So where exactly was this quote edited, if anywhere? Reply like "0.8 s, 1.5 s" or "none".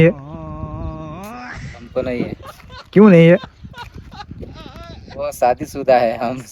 none